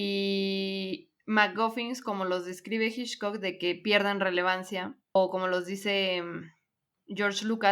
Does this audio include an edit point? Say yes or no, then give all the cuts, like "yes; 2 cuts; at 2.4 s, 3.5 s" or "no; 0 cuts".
yes; 1 cut; at 5.0 s